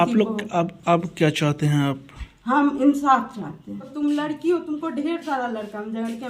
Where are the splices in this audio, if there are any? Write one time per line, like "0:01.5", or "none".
0:03.9